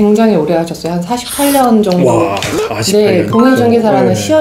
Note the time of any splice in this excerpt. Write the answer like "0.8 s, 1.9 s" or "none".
3.0 s